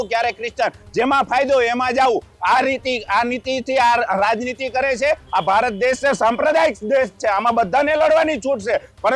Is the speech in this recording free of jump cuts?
no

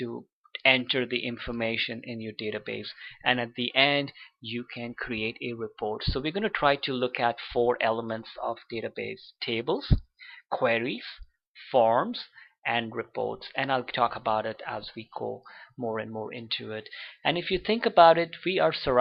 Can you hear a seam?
no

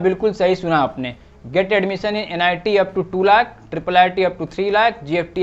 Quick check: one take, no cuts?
yes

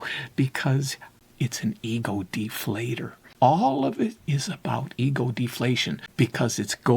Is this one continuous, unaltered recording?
no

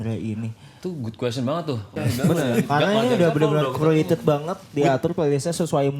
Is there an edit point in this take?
yes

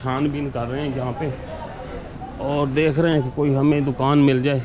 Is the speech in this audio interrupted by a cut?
no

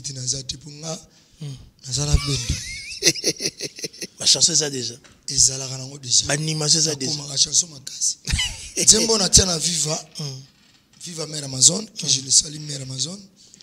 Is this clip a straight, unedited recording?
no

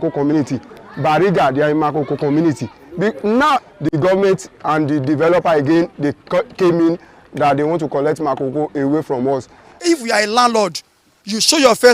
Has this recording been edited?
yes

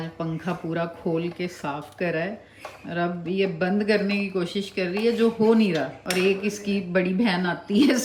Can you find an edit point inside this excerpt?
no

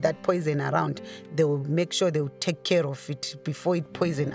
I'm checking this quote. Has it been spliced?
no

